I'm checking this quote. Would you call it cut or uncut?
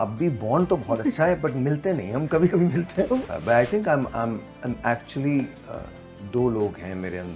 cut